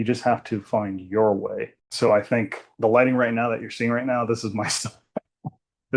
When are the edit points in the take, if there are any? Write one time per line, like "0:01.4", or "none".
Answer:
0:01.8